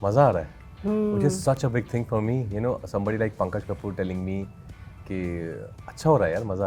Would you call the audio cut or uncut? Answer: uncut